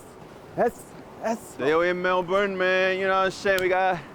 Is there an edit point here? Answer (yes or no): yes